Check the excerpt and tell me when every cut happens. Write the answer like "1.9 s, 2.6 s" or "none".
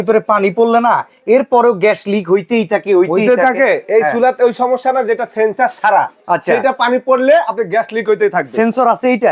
none